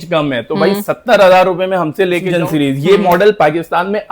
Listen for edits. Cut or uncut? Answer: cut